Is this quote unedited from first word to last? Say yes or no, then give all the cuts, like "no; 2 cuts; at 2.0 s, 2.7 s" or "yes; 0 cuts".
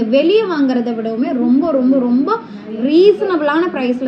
yes; 0 cuts